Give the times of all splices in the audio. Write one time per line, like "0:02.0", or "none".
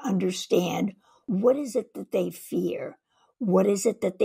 0:01.1